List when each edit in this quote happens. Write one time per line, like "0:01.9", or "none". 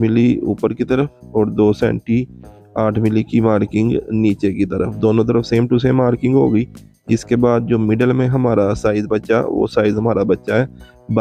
none

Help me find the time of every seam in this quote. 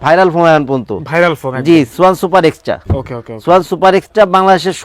none

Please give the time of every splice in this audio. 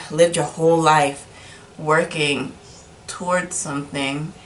none

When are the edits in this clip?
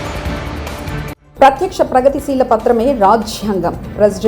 0:01.2

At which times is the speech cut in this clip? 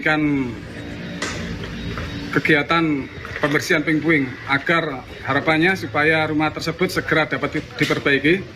none

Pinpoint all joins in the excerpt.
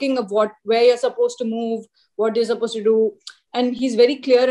none

